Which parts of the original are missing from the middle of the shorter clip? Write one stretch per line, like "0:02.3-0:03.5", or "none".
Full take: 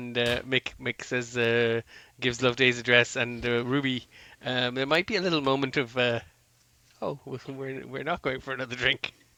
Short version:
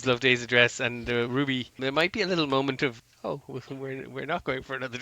0:04.1-0:04.7
0:05.9-0:06.7